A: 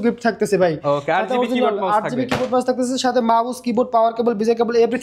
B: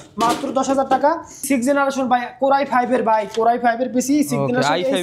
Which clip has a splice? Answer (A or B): B